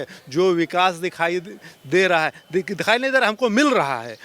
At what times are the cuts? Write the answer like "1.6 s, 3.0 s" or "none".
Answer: none